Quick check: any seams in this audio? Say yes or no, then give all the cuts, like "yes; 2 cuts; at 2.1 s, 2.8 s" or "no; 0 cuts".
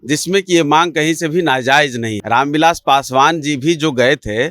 yes; 1 cut; at 2.1 s